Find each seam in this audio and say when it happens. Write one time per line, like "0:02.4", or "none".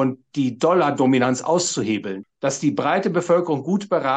0:02.2

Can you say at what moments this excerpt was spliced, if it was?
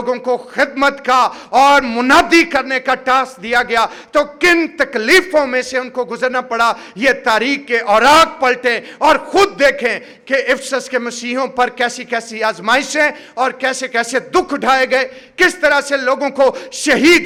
none

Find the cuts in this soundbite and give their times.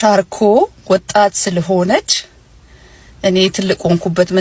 none

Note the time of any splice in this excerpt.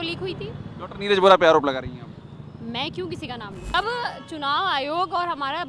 0:03.7

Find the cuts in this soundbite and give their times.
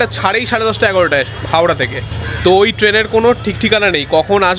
0:01.6

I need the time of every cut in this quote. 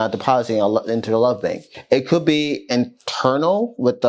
0:01.7

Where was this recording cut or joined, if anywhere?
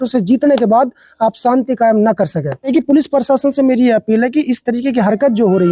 0:02.7

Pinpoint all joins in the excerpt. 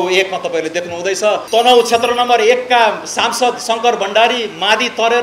0:01.4

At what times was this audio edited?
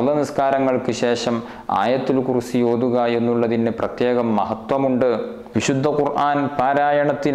0:05.4

